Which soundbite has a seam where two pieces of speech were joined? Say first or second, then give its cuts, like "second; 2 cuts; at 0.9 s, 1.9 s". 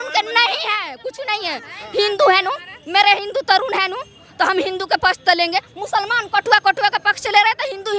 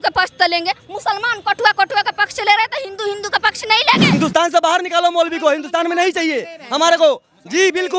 second; 1 cut; at 4.1 s